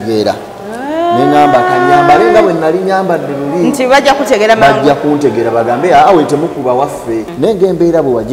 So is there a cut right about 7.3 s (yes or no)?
yes